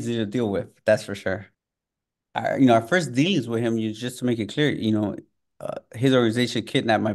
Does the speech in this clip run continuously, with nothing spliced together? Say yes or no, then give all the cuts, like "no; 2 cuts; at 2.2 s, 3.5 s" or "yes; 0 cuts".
no; 1 cut; at 2.0 s